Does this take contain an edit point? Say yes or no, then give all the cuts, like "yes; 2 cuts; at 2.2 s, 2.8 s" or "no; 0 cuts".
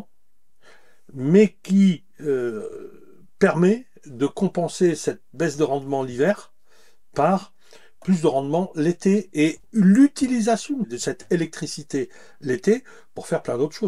yes; 1 cut; at 10.9 s